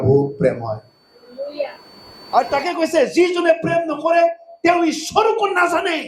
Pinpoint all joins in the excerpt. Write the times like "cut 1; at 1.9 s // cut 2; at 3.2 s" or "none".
none